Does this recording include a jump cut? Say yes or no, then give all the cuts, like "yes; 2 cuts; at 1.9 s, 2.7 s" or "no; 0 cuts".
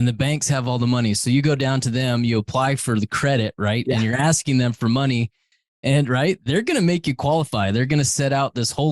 no; 0 cuts